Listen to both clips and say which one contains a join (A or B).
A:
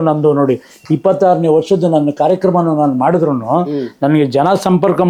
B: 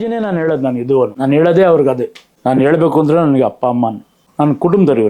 B